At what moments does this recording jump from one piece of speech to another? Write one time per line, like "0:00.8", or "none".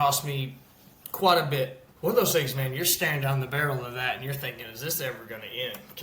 0:01.8